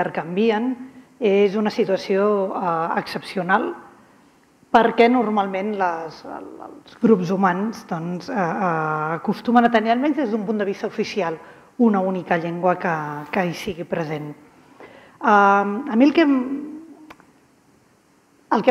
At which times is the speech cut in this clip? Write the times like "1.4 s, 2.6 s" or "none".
4.9 s